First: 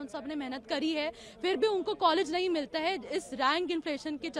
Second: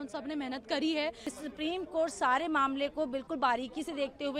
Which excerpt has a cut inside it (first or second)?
second